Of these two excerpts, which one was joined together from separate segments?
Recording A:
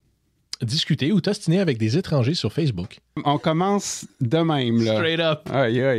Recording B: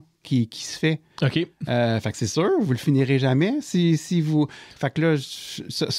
A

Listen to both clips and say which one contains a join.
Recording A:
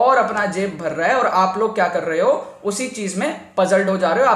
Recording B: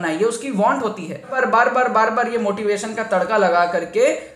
B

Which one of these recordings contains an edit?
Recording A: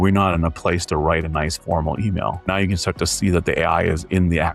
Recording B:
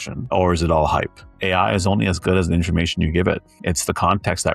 B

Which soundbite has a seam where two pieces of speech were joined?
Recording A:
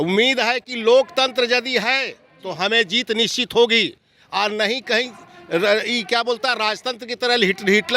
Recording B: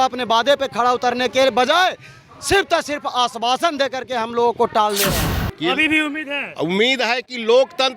B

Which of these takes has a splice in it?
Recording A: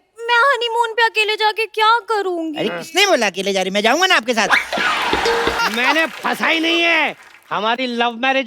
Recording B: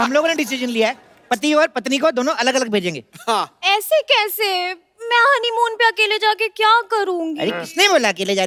A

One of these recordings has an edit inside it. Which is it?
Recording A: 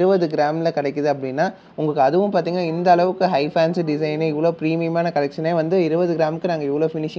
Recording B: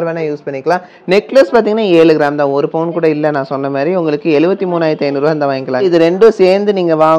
B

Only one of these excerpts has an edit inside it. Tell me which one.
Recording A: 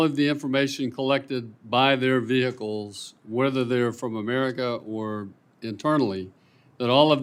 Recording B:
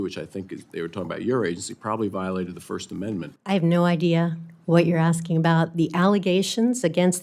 B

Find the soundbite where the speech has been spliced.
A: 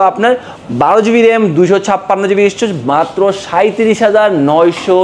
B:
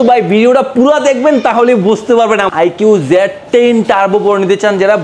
B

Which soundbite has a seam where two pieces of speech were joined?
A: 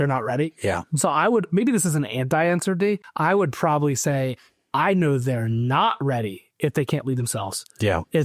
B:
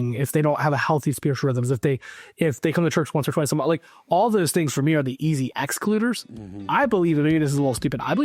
A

